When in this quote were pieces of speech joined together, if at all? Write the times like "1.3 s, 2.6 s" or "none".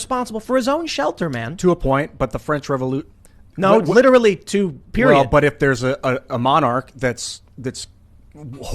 1.4 s